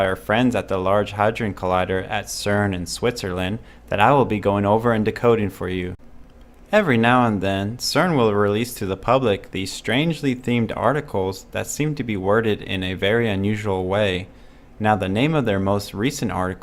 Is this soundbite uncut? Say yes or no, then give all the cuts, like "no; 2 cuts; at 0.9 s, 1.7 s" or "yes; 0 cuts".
yes; 0 cuts